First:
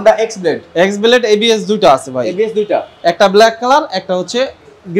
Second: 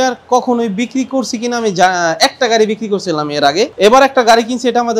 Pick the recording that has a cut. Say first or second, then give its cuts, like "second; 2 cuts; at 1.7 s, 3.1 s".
second; 1 cut; at 3.7 s